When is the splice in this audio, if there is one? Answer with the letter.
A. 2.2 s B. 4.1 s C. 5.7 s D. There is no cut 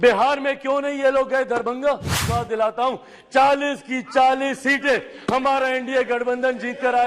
A